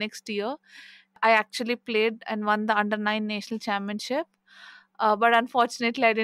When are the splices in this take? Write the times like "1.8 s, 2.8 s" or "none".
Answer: 1.2 s